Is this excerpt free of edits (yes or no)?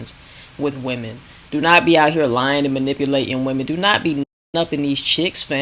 yes